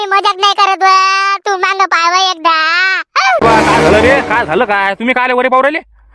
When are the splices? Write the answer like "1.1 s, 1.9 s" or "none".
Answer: 3.4 s